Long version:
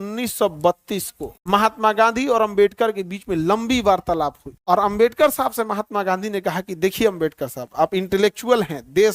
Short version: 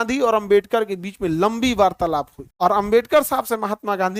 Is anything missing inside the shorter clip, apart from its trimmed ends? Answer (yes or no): no